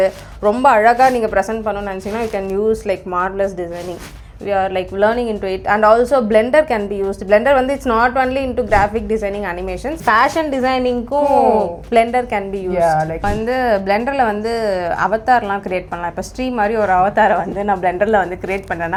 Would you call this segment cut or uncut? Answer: uncut